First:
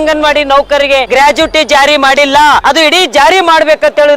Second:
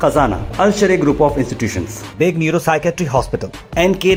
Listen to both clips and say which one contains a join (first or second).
first